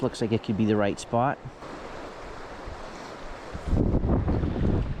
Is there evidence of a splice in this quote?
yes; 1 cut; at 1.7 s

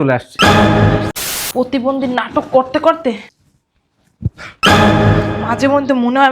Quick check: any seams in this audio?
yes; 1 cut; at 1.1 s

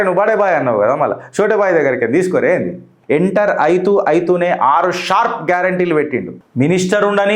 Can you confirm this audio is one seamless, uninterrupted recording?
no; 2 cuts; at 2.9 s, 6.3 s

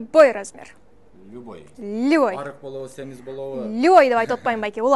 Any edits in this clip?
no; 0 cuts

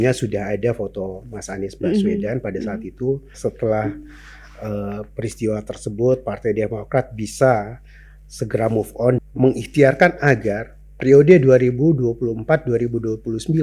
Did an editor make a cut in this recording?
yes; 2 cuts; at 3.3 s, 9.2 s

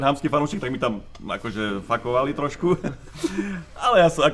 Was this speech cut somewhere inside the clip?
no; 0 cuts

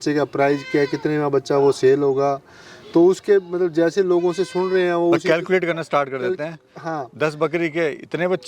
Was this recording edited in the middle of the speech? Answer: no; 0 cuts

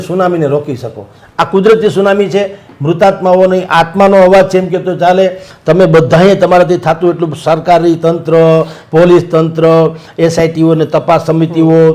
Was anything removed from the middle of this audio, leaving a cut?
no; 0 cuts

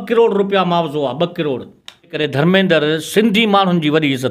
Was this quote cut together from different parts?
yes; 1 cut; at 2.1 s

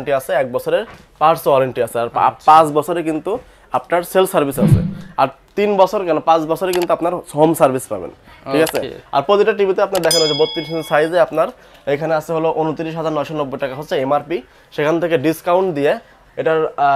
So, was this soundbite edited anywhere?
no; 0 cuts

